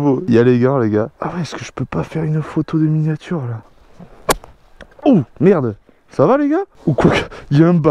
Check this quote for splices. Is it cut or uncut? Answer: cut